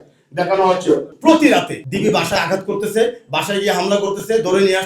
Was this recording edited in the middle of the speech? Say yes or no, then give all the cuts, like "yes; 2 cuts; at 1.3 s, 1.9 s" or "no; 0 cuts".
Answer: yes; 2 cuts; at 1.1 s, 1.8 s